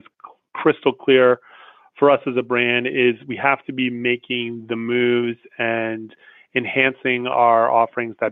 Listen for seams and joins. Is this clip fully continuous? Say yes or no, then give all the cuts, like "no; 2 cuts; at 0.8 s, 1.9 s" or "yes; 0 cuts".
yes; 0 cuts